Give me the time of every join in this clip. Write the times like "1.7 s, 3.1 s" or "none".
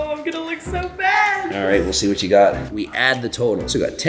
1.5 s, 2.7 s